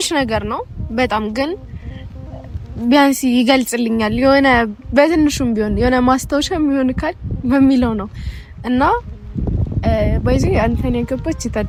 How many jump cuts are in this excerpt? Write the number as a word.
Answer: zero